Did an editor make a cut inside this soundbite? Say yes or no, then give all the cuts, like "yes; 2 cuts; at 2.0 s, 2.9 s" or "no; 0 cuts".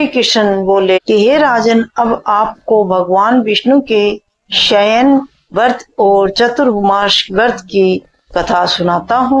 yes; 1 cut; at 1.0 s